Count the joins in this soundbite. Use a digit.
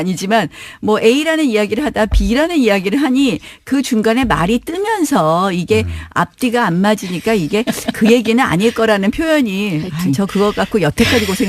1